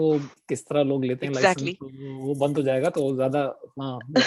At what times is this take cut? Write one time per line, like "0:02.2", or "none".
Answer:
none